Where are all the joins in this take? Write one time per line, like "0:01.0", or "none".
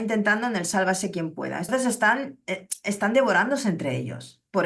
0:01.7